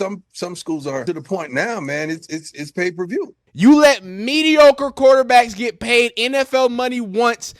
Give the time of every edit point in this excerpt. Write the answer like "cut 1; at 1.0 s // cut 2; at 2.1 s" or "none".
cut 1; at 1.0 s // cut 2; at 3.4 s